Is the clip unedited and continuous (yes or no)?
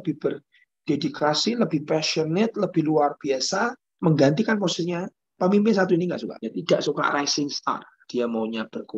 no